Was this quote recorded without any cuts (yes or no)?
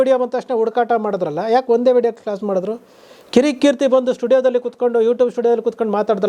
yes